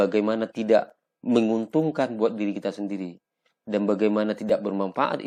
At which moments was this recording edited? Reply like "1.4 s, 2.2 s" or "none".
none